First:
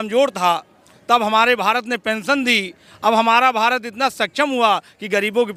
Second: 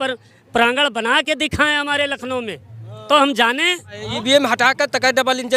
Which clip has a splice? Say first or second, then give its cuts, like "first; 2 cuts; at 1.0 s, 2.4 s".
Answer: second; 1 cut; at 3.9 s